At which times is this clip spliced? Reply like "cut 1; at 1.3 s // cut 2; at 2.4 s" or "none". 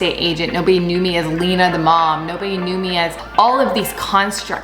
cut 1; at 3.2 s